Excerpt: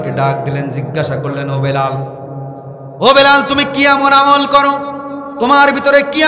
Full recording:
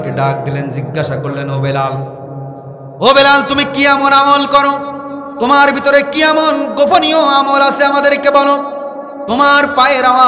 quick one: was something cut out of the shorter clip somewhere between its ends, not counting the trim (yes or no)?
no